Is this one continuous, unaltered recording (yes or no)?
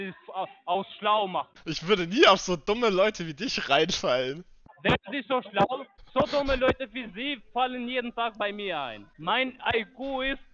no